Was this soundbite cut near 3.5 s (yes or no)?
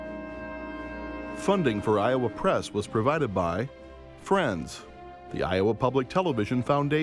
no